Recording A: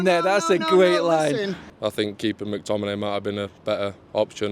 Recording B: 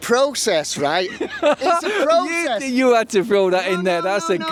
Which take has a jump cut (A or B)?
A